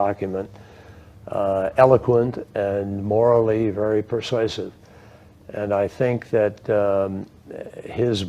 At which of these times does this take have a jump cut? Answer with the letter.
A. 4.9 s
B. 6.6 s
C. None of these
A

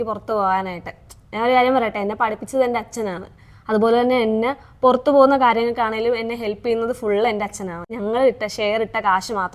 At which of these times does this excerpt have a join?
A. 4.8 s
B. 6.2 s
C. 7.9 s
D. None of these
C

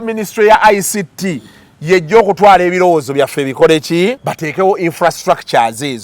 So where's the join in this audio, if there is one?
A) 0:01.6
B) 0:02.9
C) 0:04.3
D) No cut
C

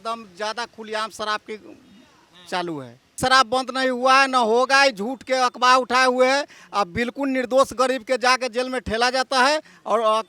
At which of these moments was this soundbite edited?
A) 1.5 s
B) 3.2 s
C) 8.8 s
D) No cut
B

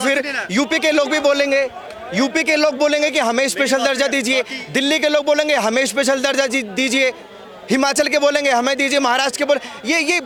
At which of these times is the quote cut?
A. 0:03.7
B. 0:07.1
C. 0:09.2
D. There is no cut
D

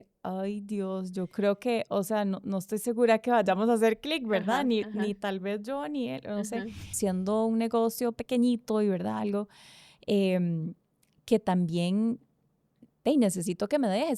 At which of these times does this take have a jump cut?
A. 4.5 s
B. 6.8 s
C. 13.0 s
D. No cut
B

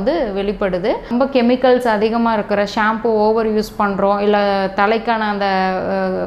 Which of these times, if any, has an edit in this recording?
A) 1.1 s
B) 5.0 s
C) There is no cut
A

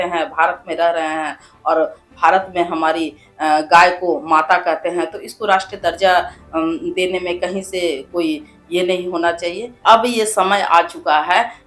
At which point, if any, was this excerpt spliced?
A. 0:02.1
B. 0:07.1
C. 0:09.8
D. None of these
C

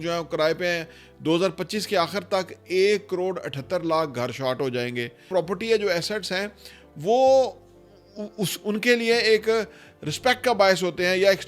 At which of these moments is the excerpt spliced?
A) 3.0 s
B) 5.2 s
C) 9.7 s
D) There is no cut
B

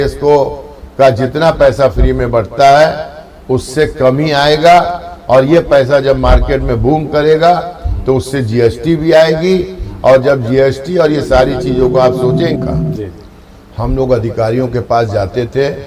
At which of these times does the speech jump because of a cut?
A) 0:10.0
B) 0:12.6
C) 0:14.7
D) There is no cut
B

